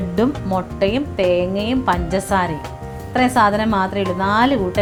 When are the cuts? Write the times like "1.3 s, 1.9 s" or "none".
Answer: none